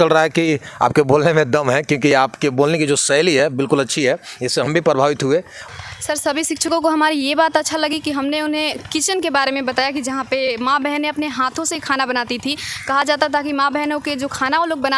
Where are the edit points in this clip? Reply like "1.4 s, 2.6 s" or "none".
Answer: 5.6 s